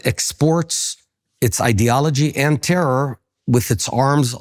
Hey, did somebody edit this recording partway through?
no; 0 cuts

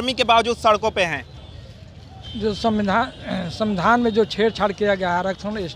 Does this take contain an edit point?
no; 0 cuts

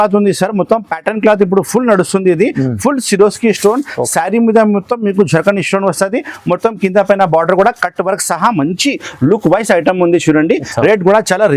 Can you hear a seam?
no; 0 cuts

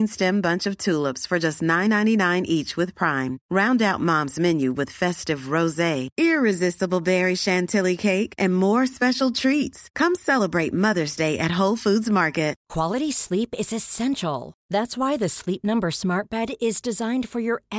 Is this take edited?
yes; 1 cut; at 12.6 s

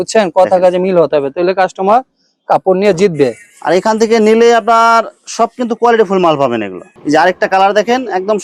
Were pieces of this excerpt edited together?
no; 0 cuts

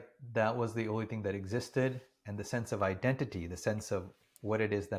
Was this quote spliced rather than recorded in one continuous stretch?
no; 0 cuts

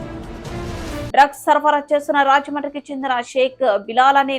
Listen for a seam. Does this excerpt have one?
yes; 1 cut; at 1.1 s

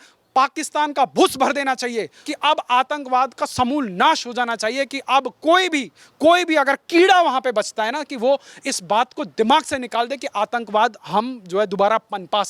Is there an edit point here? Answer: no; 0 cuts

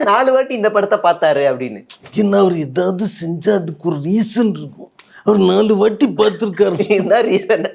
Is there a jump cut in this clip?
no; 0 cuts

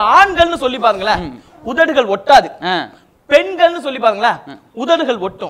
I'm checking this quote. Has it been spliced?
no; 0 cuts

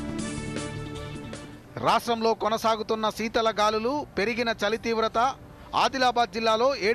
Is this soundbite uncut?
no; 1 cut; at 1.5 s

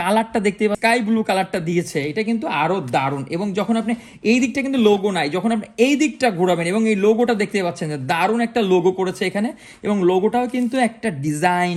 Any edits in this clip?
no; 0 cuts

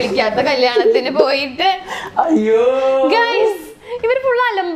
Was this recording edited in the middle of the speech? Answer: no; 0 cuts

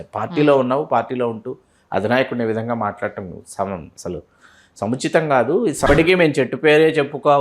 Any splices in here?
yes; 1 cut; at 5.9 s

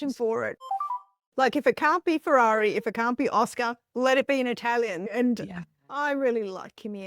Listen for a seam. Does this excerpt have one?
yes; 1 cut; at 1.1 s

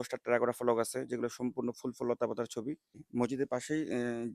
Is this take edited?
yes; 1 cut; at 3.0 s

